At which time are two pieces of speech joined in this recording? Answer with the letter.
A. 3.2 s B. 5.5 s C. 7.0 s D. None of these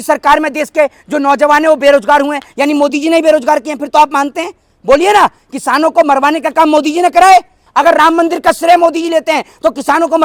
D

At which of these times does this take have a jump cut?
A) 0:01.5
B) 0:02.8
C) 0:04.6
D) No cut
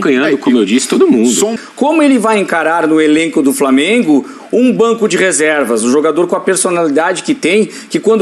A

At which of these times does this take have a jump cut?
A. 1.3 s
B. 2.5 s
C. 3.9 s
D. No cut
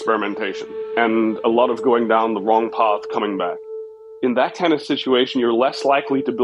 C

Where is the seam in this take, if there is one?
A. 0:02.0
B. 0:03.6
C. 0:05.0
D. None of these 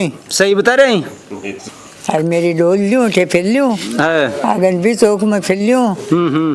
D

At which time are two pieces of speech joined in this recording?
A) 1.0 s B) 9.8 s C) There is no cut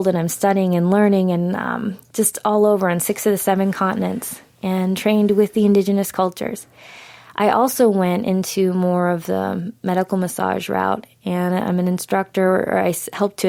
C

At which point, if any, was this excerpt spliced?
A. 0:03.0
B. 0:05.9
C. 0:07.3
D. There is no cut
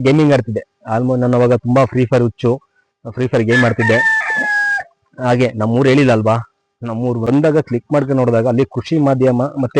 C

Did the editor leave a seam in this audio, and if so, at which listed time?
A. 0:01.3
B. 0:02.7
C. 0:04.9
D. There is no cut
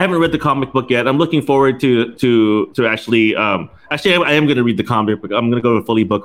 D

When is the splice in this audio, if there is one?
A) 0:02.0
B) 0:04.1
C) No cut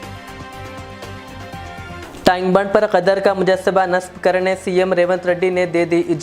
A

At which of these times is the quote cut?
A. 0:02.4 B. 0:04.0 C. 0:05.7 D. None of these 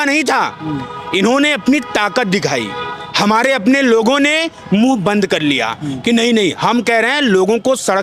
D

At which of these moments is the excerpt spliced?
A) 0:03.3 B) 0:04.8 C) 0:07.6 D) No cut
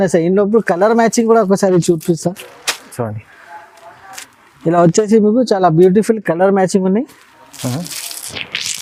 D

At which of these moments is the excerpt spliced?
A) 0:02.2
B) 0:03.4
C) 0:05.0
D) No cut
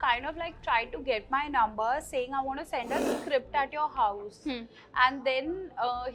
D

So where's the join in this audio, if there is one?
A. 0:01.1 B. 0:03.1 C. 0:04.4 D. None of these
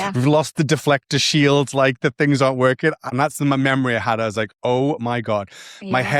B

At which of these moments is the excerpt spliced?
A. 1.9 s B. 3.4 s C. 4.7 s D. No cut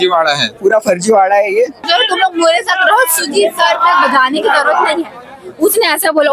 A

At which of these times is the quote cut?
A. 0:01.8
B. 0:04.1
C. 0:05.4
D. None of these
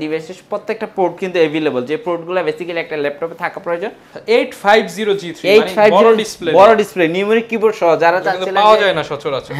B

